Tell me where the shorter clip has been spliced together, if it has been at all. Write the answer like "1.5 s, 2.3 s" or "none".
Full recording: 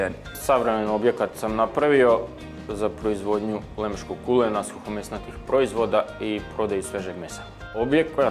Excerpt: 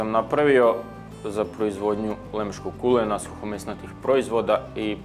none